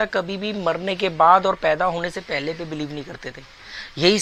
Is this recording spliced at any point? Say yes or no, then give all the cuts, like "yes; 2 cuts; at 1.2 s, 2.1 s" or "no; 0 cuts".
no; 0 cuts